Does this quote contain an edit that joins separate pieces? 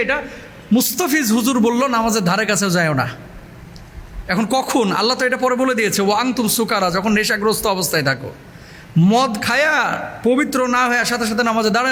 no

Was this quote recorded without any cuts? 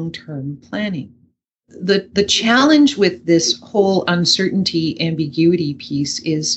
no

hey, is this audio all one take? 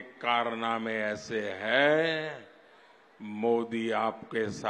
yes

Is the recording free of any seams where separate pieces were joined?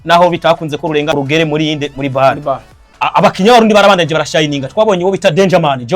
no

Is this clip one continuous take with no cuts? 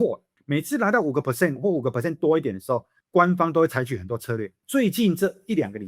no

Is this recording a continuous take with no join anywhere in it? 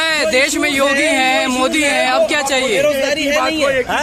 yes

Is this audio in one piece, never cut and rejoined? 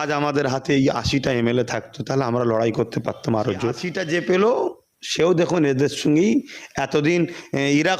no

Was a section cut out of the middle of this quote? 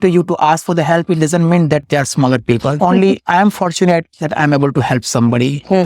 yes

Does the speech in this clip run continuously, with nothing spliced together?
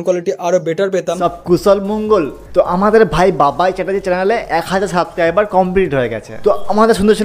no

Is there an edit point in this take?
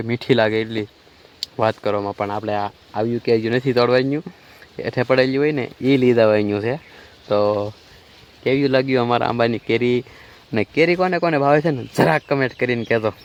no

